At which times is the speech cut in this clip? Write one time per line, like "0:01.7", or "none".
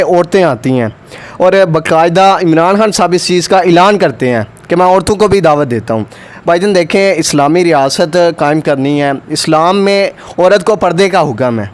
none